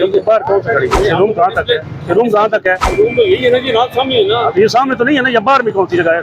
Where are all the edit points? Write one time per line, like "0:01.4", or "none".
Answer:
0:00.9
0:02.9